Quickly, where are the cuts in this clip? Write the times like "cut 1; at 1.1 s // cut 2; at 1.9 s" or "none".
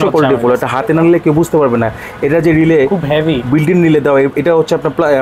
none